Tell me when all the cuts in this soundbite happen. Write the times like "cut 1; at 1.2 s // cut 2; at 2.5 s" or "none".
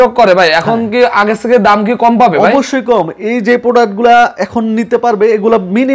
none